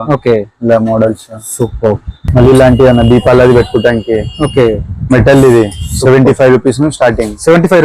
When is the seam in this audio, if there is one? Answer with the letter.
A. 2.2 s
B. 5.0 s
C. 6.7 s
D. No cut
A